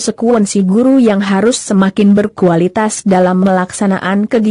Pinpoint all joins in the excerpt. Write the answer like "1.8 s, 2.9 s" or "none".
none